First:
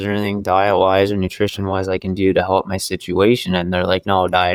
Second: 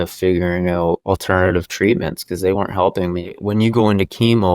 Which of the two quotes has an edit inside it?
second; 2 cuts; at 1.0 s, 3.3 s

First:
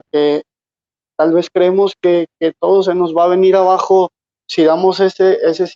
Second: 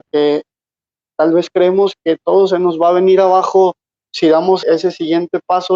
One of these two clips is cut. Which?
second; 2 cuts; at 2.0 s, 4.6 s

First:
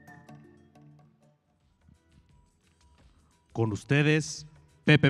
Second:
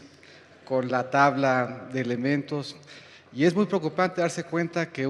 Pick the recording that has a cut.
second; 1 cut; at 1.8 s

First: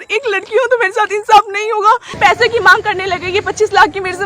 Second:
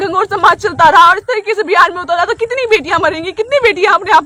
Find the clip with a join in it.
first; 1 cut; at 2.2 s

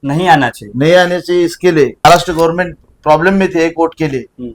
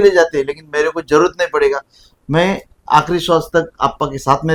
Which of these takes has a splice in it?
first; 1 cut; at 2.0 s

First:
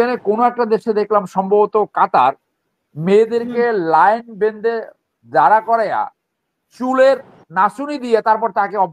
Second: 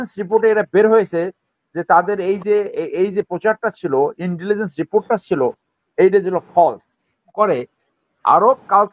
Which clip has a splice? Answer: second; 1 cut; at 7.2 s

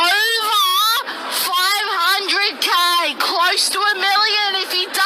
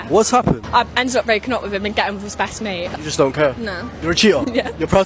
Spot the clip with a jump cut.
second; 1 cut; at 2.9 s

